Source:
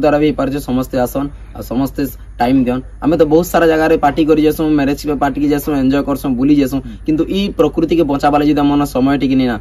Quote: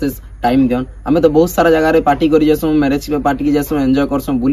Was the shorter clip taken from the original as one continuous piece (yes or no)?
yes